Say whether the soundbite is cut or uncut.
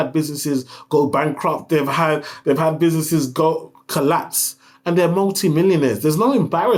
uncut